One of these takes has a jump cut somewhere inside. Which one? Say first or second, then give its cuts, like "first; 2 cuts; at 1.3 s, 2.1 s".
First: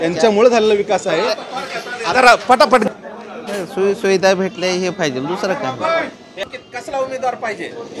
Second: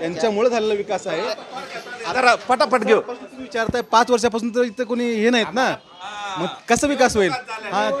first; 2 cuts; at 2.9 s, 6.5 s